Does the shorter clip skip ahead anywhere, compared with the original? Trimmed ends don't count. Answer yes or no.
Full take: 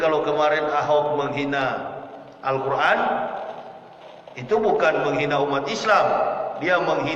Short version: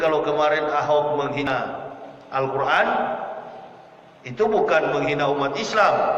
yes